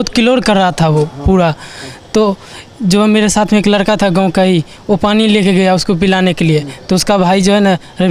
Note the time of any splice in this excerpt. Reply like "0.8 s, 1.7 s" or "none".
none